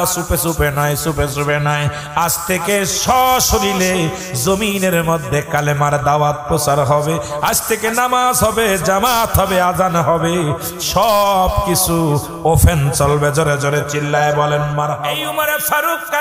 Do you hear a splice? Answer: yes; 1 cut; at 15.1 s

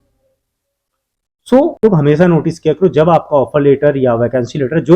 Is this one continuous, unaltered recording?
no; 1 cut; at 1.8 s

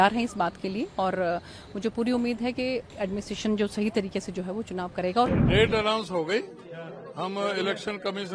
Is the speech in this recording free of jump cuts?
no; 1 cut; at 5.3 s

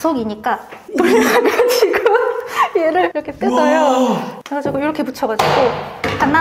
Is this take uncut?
yes; 0 cuts

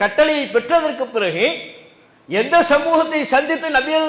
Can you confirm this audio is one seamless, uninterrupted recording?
yes; 0 cuts

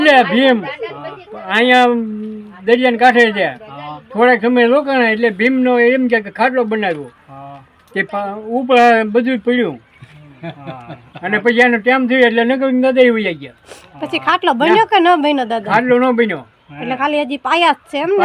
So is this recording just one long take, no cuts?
yes; 0 cuts

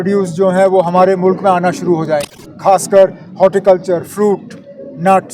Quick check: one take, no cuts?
no; 1 cut; at 2.9 s

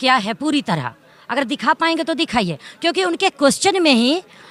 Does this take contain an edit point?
no; 0 cuts

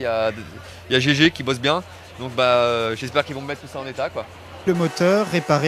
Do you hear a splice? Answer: yes; 1 cut; at 4.7 s

